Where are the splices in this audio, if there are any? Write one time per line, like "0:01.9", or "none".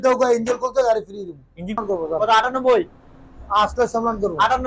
0:01.8